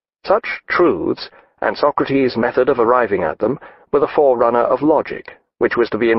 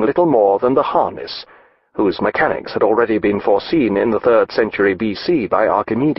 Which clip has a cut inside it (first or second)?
first